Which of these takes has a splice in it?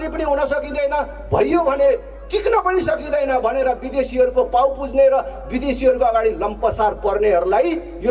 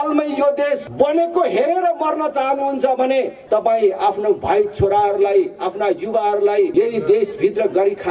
second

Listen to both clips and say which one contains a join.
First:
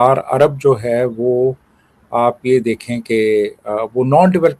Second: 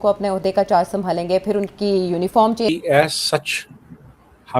second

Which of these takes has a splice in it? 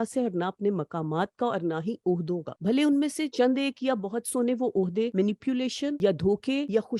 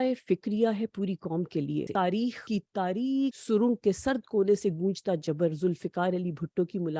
second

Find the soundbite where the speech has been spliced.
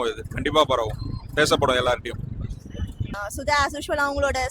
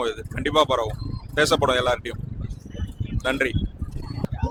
first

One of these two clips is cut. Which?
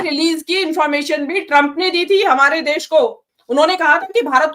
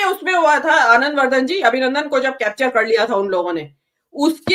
first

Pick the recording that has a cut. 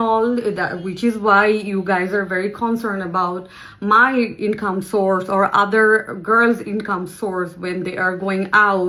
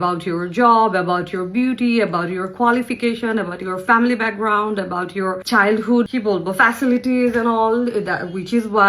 second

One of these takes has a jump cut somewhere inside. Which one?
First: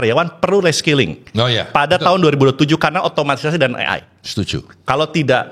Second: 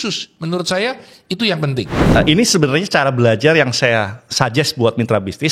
second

